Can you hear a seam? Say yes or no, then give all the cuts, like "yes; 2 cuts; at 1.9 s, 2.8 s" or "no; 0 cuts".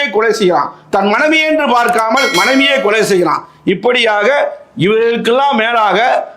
no; 0 cuts